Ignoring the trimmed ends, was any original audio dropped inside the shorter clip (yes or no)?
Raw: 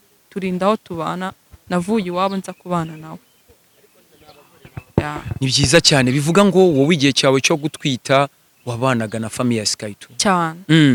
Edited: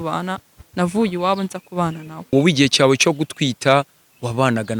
yes